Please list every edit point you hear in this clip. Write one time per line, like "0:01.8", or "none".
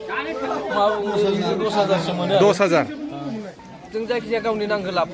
0:03.5